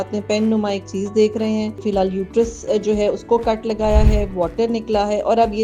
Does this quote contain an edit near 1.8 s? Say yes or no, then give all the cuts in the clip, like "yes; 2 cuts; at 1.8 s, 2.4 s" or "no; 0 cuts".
yes; 1 cut; at 1.8 s